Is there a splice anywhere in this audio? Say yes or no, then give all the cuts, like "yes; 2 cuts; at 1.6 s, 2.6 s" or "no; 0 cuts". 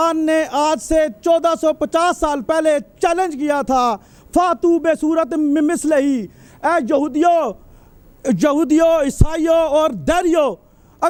no; 0 cuts